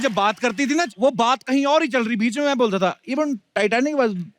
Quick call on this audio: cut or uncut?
cut